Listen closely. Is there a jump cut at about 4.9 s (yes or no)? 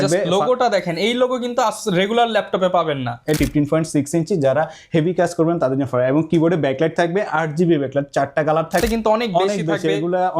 no